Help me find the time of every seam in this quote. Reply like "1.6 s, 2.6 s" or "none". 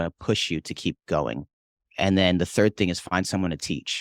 none